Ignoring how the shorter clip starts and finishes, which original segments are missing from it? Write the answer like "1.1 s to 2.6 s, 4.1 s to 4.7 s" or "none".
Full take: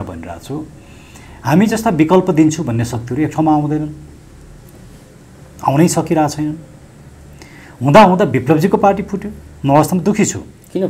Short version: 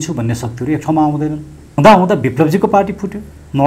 4.2 s to 7.8 s